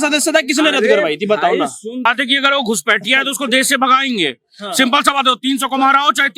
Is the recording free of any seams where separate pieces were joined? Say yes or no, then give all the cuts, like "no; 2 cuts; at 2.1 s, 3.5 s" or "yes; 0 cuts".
no; 1 cut; at 2.1 s